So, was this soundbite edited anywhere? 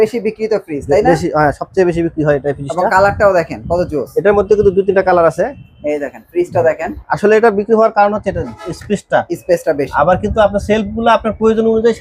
no; 0 cuts

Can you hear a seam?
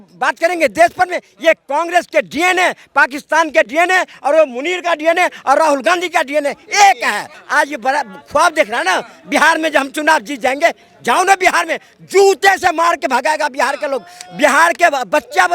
yes; 1 cut; at 7.4 s

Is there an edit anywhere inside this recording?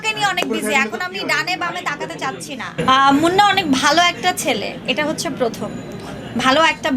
yes; 1 cut; at 2.8 s

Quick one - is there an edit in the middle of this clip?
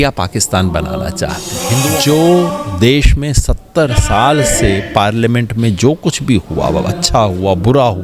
yes; 1 cut; at 1.7 s

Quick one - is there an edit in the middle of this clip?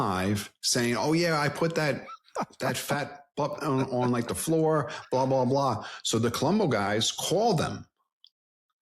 no; 0 cuts

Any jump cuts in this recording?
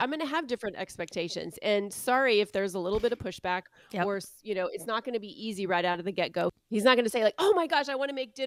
no; 0 cuts

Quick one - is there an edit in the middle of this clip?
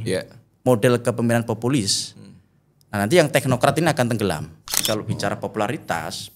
yes; 1 cut; at 4.8 s

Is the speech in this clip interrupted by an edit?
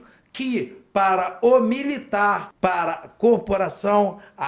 yes; 1 cut; at 2.5 s

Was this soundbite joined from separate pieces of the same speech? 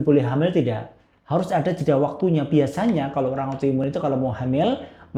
no; 0 cuts

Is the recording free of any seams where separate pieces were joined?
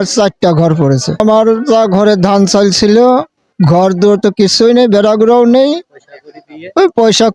no; 1 cut; at 1.2 s

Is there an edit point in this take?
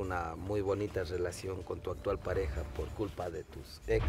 no; 0 cuts

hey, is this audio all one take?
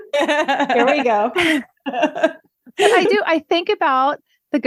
yes; 0 cuts

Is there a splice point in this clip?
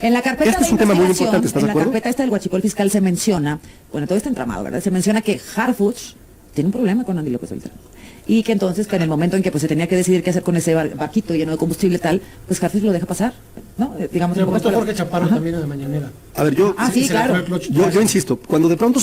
no; 0 cuts

